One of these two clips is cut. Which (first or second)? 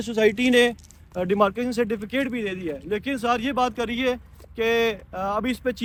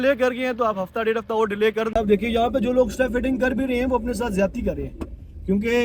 second